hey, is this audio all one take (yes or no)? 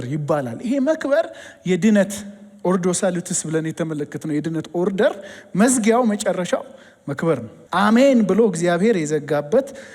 no